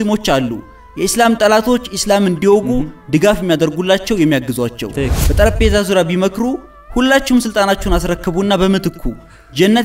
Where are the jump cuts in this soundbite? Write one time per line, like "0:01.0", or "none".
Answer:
0:05.1